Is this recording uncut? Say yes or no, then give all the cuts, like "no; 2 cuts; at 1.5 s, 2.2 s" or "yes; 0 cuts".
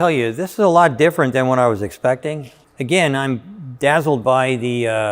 yes; 0 cuts